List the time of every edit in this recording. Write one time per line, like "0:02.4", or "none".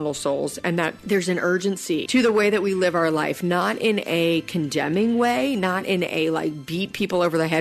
0:01.0
0:02.1